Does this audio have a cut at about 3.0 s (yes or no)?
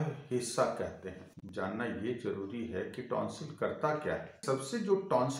no